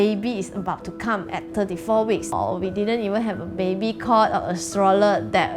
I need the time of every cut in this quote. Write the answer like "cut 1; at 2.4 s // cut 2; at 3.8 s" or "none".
cut 1; at 1.5 s // cut 2; at 2.3 s